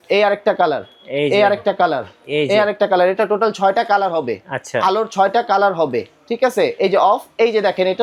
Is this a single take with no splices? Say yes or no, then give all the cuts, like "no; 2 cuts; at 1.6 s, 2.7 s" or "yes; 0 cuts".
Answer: yes; 0 cuts